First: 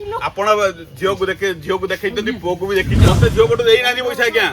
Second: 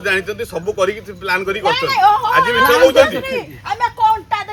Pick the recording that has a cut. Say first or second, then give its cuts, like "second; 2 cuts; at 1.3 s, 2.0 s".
first; 1 cut; at 3.0 s